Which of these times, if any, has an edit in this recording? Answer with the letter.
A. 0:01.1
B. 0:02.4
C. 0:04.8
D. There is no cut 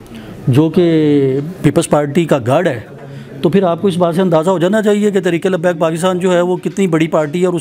D